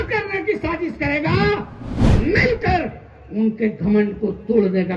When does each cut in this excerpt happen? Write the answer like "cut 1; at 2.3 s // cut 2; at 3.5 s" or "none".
cut 1; at 2.0 s